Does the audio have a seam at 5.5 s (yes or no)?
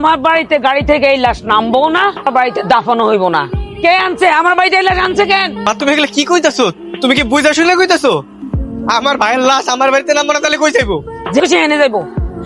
no